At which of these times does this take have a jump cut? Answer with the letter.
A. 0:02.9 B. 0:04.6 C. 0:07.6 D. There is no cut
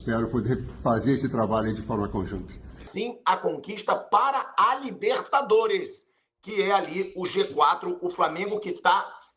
A